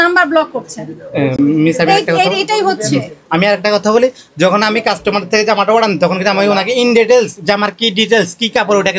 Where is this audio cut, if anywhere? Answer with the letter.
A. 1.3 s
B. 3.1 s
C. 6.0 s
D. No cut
D